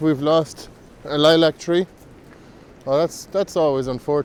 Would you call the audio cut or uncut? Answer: uncut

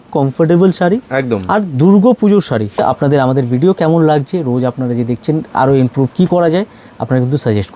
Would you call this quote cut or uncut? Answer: cut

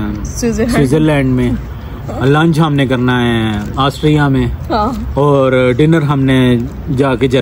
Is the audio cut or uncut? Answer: uncut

